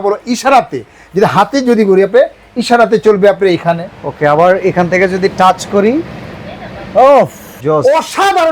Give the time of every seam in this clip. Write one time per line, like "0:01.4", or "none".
0:07.5